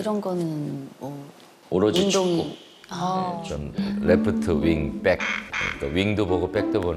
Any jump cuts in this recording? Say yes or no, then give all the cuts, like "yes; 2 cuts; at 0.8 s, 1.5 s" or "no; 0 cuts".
yes; 1 cut; at 3.5 s